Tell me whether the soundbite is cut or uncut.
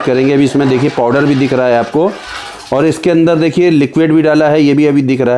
uncut